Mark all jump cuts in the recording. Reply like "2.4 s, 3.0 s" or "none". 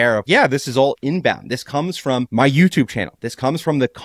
none

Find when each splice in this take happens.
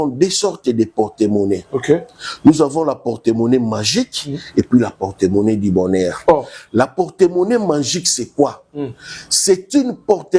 none

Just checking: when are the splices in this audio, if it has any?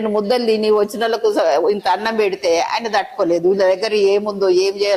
none

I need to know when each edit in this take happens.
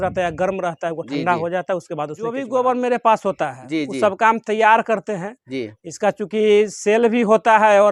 2.4 s

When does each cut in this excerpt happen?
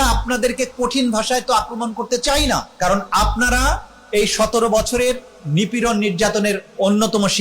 2.7 s

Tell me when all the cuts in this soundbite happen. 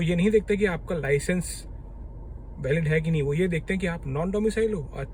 none

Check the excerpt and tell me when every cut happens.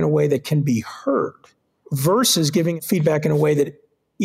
1.8 s, 2.8 s

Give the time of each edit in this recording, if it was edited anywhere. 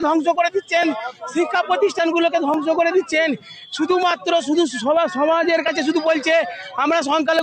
none

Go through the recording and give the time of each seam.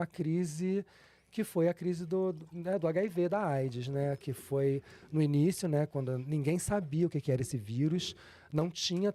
none

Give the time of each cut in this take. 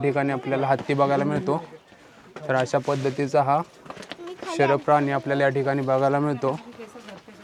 none

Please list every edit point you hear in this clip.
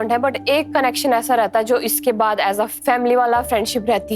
2.7 s

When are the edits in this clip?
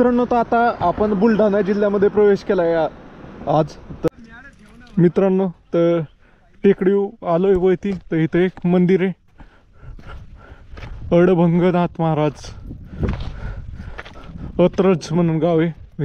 4.1 s

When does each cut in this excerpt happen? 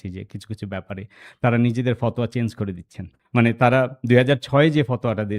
3.1 s

